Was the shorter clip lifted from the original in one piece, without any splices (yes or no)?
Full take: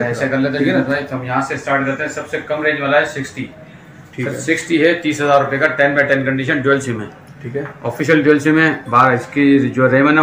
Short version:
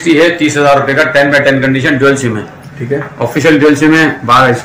yes